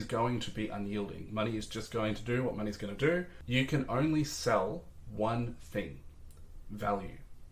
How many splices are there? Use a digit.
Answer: 1